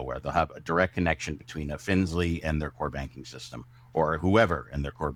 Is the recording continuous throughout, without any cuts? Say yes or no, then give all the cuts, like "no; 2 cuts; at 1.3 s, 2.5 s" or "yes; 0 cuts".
yes; 0 cuts